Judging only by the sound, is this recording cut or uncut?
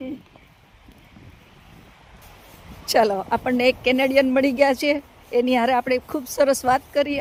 uncut